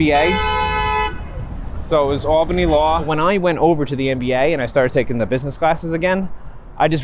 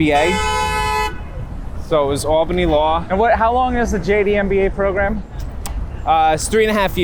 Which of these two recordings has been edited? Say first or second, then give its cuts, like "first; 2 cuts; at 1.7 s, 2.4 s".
first; 1 cut; at 3.1 s